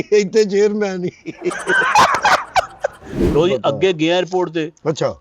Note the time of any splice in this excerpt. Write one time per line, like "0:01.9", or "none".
0:03.2